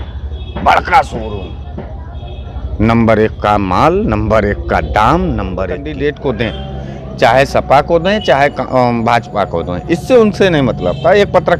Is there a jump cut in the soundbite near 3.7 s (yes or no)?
no